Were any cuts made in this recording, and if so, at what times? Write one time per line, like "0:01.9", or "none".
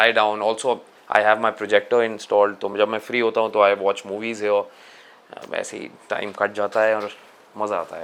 none